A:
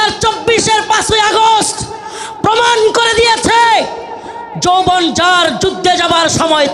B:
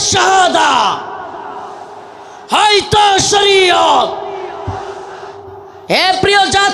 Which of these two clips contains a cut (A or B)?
B